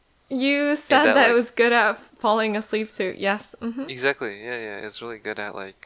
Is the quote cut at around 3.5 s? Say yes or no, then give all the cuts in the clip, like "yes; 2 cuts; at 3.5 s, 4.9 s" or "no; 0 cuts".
no; 1 cut; at 2.1 s